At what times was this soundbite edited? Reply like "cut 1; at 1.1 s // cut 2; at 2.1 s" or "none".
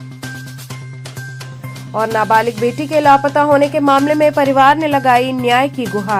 none